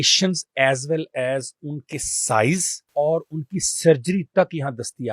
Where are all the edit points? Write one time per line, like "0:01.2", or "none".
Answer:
0:02.8